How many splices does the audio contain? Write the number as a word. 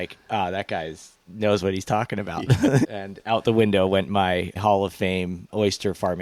zero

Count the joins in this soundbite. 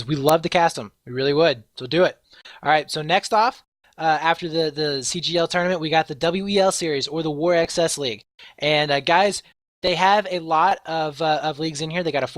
one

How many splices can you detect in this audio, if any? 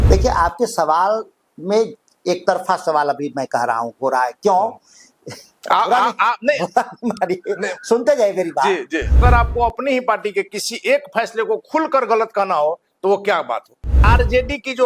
two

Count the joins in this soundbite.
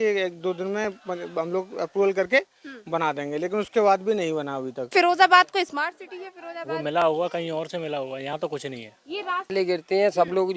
two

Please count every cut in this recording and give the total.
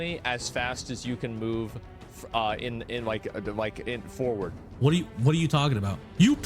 one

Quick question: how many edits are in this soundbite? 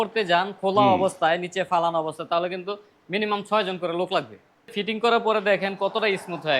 one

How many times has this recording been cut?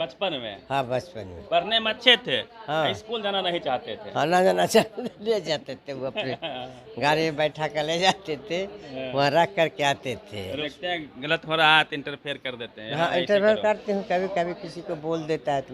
one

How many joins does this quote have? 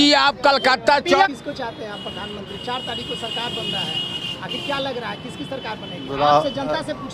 one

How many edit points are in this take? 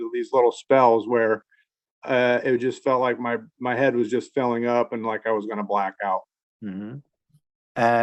zero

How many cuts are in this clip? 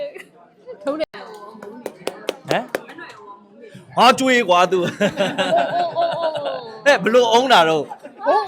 one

